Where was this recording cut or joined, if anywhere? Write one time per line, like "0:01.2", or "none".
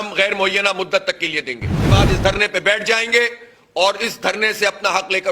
0:01.9